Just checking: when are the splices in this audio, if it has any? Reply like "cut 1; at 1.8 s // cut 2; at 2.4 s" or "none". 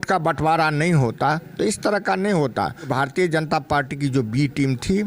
cut 1; at 2.9 s